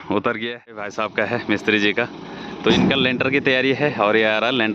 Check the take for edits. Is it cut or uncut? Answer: cut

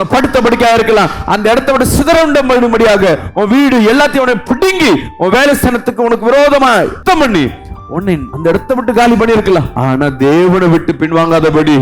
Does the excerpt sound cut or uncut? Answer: cut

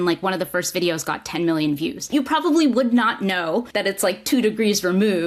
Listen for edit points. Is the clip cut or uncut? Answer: cut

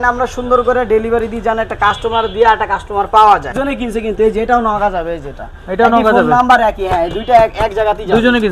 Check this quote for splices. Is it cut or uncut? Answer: cut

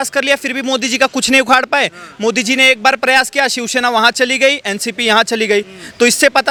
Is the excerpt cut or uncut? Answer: uncut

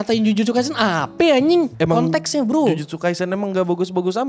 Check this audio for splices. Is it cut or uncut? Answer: cut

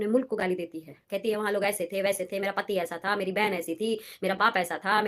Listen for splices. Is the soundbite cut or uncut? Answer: cut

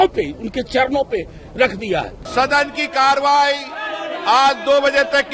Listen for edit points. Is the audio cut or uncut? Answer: cut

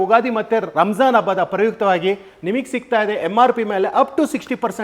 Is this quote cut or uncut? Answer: uncut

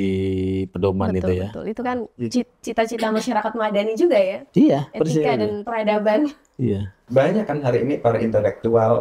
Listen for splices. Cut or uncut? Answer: cut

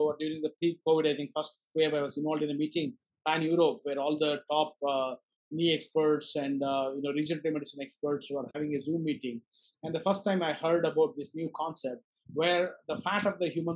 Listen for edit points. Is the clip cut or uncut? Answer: uncut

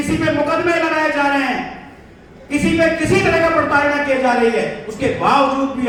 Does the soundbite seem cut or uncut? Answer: uncut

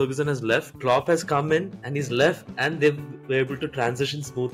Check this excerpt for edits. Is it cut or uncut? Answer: uncut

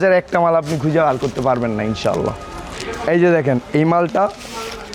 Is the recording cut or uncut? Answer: uncut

